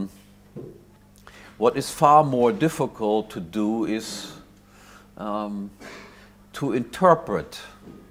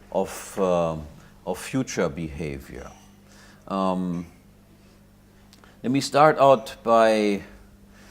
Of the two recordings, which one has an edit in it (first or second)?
second